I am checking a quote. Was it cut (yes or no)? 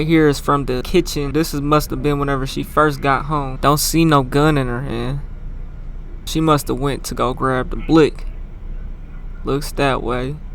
yes